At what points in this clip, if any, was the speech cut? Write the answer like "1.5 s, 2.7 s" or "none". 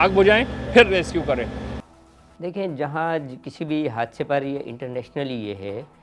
none